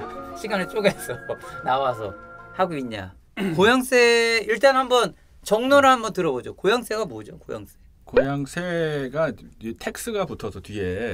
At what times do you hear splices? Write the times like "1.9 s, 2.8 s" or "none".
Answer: none